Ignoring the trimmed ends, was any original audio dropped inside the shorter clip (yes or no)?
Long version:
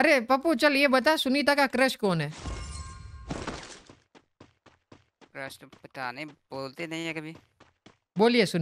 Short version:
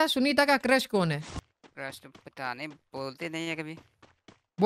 yes